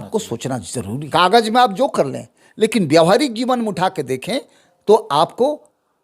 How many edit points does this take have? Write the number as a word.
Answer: one